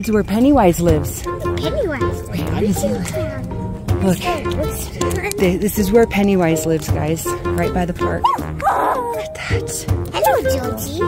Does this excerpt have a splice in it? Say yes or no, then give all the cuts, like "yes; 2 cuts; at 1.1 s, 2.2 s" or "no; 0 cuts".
no; 0 cuts